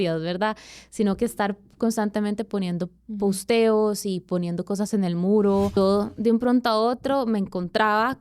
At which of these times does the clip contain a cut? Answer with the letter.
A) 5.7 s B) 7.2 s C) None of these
A